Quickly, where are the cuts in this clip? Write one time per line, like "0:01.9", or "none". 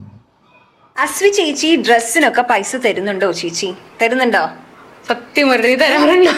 0:00.9